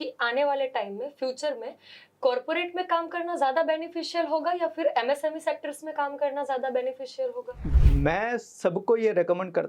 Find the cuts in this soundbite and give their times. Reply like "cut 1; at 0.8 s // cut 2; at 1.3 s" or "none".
cut 1; at 7.7 s